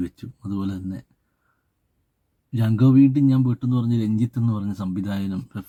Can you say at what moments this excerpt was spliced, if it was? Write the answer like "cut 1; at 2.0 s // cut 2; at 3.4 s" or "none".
none